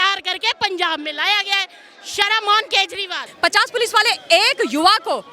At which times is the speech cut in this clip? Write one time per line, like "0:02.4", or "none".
0:03.2